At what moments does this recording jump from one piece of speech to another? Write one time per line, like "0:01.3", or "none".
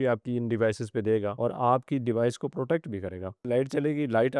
0:01.3
0:03.5